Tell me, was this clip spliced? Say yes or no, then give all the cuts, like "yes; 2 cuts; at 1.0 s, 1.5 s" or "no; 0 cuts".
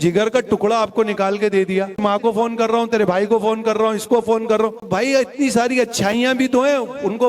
yes; 2 cuts; at 2.0 s, 4.9 s